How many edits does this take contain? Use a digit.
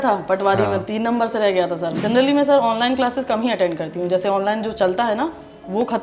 1